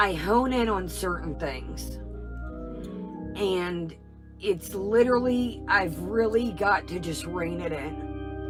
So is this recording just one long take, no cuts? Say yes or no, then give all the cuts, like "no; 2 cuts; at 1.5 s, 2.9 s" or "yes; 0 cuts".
yes; 0 cuts